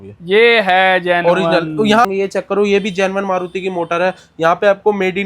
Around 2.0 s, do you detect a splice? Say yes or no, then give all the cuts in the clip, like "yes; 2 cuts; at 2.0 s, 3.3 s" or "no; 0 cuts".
yes; 1 cut; at 2.0 s